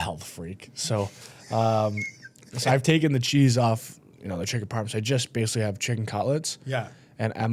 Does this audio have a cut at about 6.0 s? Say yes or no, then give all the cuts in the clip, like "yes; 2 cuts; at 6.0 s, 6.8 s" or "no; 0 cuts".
no; 0 cuts